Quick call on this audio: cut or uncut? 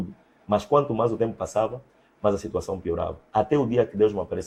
uncut